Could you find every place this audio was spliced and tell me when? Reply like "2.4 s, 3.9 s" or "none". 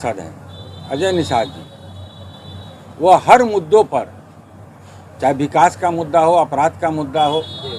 none